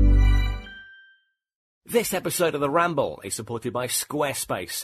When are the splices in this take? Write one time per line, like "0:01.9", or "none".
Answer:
0:01.8